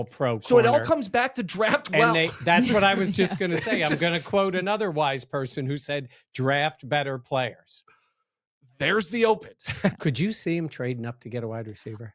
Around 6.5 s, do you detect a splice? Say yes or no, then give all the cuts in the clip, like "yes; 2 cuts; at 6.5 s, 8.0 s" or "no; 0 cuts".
no; 1 cut; at 10.0 s